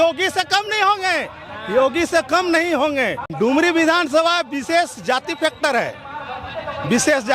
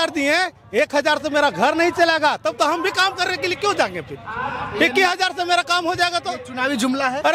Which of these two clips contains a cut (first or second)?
first